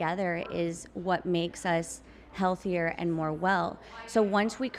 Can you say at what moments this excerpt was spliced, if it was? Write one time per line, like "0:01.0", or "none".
none